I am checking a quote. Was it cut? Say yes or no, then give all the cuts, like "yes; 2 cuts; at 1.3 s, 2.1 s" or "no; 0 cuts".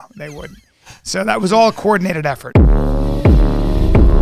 yes; 1 cut; at 2.4 s